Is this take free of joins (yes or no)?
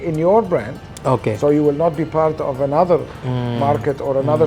yes